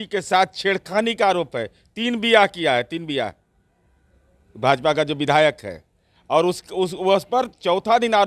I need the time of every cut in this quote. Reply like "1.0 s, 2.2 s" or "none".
none